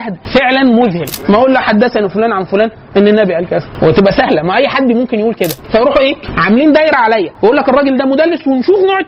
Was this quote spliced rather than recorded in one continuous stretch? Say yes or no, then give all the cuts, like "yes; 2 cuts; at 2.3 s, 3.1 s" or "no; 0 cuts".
yes; 2 cuts; at 1.2 s, 5.6 s